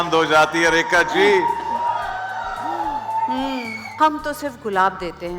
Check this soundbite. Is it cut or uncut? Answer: cut